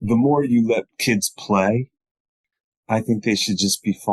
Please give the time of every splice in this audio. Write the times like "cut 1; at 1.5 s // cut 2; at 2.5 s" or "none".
cut 1; at 0.9 s // cut 2; at 2.4 s